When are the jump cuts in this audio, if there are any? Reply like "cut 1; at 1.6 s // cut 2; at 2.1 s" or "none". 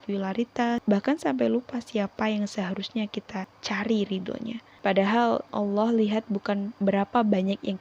cut 1; at 0.8 s // cut 2; at 3.5 s // cut 3; at 4.6 s // cut 4; at 5.5 s // cut 5; at 6.7 s